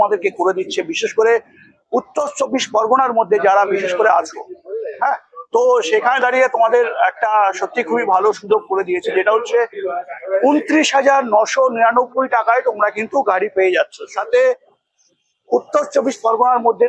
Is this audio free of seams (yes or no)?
yes